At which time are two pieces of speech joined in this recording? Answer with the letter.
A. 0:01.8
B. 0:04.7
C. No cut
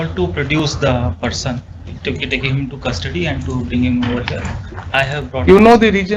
C